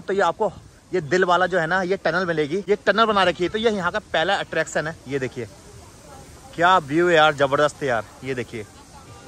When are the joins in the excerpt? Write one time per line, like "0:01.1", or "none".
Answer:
none